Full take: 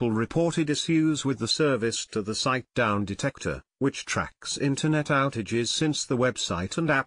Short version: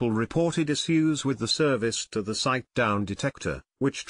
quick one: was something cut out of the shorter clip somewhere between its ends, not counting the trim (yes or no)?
no